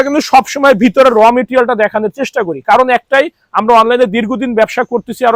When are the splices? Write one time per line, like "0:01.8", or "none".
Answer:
none